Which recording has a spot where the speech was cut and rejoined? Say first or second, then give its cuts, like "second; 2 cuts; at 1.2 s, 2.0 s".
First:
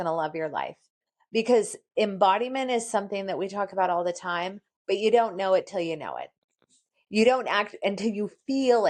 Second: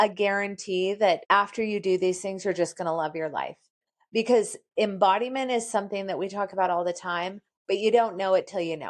second; 1 cut; at 1.2 s